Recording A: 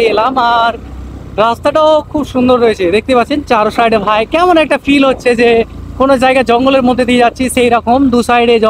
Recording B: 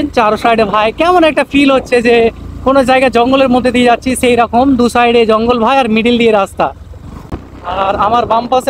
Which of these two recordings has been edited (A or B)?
B